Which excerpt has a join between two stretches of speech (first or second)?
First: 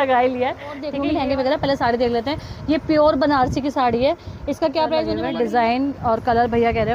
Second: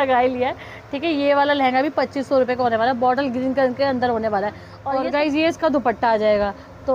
first